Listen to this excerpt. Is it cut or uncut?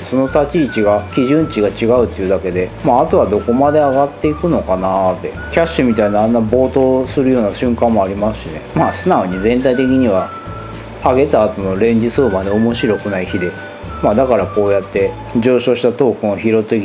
uncut